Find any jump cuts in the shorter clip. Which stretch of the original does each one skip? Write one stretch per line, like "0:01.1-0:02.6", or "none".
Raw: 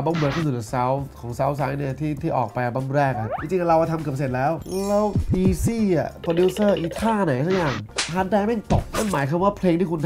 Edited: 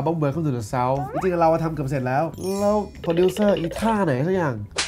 0:01.1-0:03.4
0:05.2-0:06.1